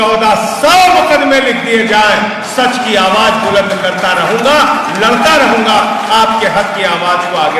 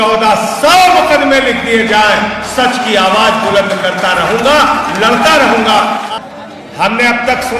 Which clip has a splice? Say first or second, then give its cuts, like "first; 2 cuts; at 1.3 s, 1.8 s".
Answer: second; 1 cut; at 6.0 s